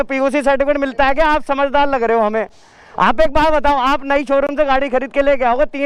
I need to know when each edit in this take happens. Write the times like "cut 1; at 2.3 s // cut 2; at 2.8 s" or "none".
none